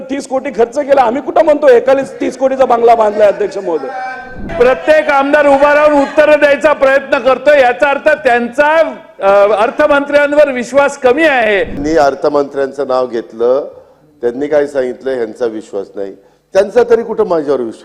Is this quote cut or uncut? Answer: cut